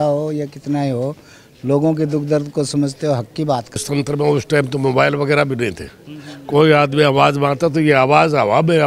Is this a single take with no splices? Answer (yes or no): no